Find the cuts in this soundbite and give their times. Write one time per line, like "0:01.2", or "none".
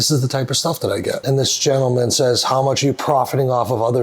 0:01.2

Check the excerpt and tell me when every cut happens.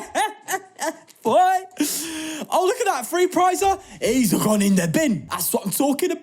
0:05.3

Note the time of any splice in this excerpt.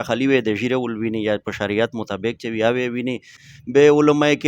0:03.4

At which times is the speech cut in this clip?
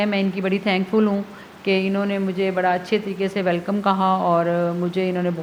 none

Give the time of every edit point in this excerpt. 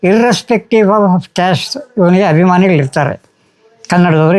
none

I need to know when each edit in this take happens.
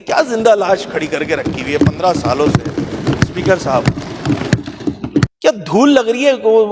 0:05.3

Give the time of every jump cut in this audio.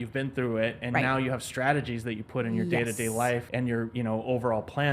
0:03.5

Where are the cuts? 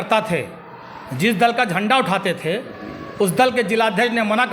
none

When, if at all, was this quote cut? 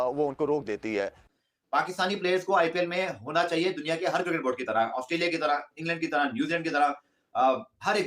0:01.2

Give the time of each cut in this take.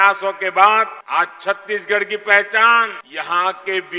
0:01.0
0:03.0

